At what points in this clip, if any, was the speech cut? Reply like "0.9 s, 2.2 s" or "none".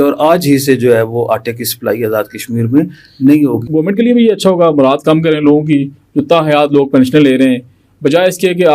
3.6 s